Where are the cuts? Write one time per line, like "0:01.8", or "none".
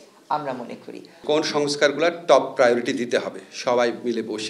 0:01.1